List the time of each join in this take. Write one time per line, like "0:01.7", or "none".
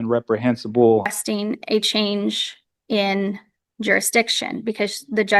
0:01.2